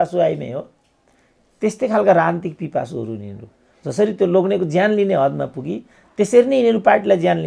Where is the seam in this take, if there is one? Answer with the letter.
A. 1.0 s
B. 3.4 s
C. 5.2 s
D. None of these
D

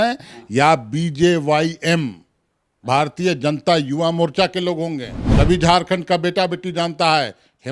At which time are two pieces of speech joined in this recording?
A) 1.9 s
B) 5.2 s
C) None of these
B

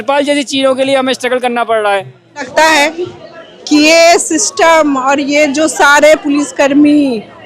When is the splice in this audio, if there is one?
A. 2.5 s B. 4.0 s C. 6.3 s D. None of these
A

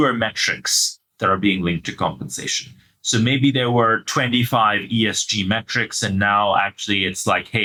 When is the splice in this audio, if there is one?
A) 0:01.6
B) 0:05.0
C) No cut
C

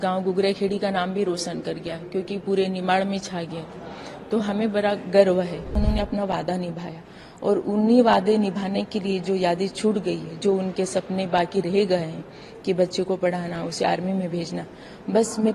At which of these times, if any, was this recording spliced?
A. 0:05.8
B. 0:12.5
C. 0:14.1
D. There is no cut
A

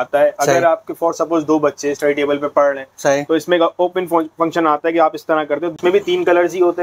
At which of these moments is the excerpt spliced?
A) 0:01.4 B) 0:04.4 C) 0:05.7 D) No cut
C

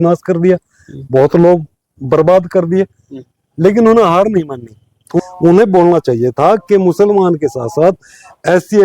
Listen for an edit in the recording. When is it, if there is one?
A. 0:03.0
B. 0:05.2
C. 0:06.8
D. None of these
B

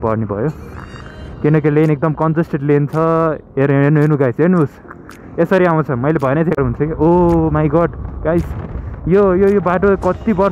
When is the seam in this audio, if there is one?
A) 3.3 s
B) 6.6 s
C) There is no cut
B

